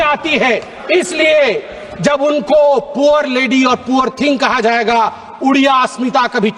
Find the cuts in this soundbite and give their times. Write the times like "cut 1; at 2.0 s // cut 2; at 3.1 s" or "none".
none